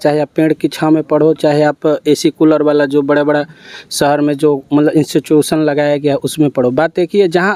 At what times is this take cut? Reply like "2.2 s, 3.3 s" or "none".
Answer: none